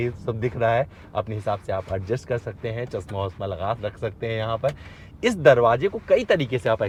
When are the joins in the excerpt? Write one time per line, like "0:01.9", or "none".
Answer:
none